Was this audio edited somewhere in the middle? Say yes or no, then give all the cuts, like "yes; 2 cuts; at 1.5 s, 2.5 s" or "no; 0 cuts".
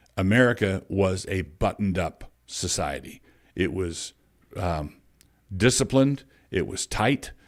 no; 0 cuts